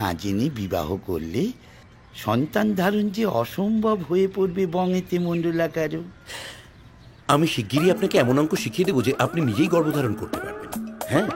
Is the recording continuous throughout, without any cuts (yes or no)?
yes